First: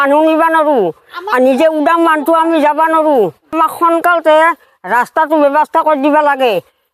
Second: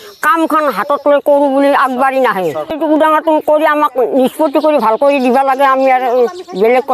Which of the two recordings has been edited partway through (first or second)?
first